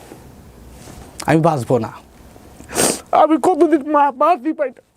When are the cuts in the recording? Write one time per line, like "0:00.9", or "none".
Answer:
0:02.0